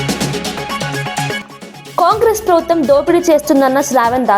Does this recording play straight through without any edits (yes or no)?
no